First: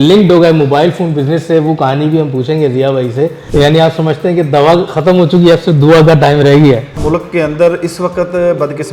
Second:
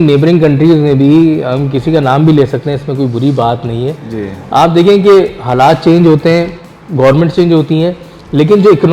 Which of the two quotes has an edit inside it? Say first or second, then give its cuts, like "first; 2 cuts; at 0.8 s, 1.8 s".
first; 2 cuts; at 3.4 s, 6.9 s